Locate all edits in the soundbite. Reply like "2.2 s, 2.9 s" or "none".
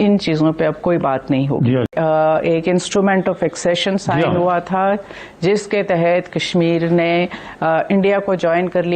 1.9 s